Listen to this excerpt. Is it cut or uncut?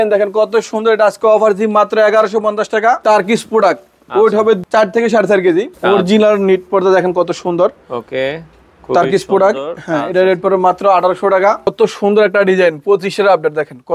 cut